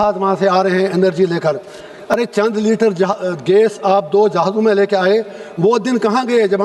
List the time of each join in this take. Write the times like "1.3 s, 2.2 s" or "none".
none

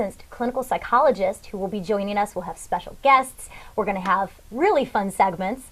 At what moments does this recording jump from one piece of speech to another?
2.6 s

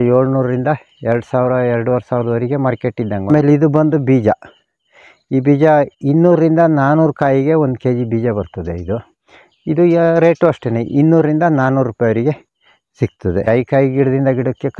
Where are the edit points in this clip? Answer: 3.3 s, 13.5 s

